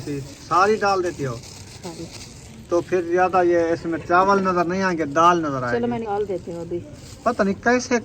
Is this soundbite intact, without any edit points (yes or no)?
no